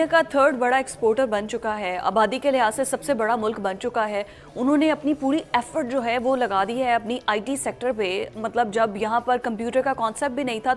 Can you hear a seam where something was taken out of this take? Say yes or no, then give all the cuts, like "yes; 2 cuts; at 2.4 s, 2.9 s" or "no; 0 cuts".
no; 0 cuts